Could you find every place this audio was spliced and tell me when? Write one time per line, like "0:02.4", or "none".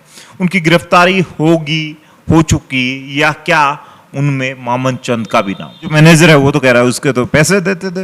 0:05.9